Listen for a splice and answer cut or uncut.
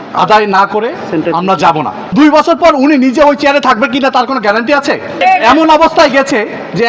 cut